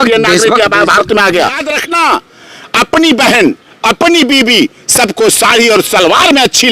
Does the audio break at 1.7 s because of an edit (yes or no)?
yes